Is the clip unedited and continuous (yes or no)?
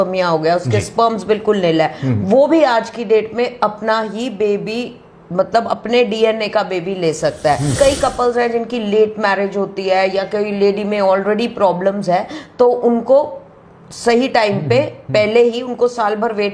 no